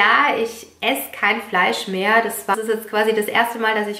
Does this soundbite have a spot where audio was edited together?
yes; 1 cut; at 2.5 s

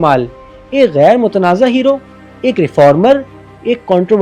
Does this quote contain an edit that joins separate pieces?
no; 0 cuts

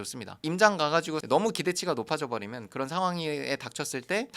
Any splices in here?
yes; 1 cut; at 1.2 s

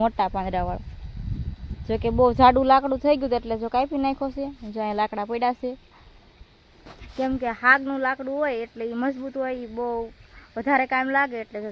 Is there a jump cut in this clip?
no; 0 cuts

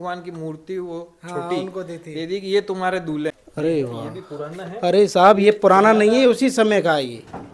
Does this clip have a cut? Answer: yes; 1 cut; at 3.4 s

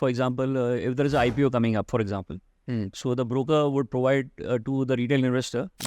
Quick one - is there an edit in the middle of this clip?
no; 0 cuts

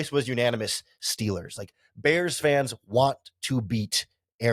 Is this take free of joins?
yes; 0 cuts

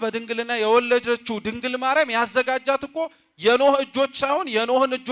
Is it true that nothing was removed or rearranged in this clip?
yes; 0 cuts

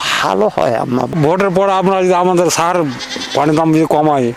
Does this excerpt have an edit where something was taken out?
yes; 1 cut; at 1.1 s

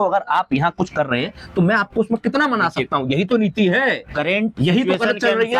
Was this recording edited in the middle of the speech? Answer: no; 0 cuts

